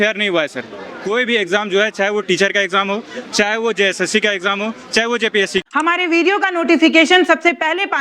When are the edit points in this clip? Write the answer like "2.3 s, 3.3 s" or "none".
5.6 s